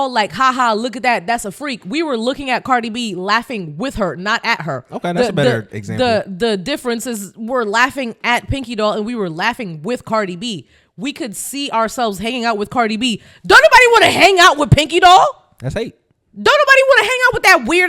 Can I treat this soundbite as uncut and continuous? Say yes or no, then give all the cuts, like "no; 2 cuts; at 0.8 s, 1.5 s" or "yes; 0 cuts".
yes; 0 cuts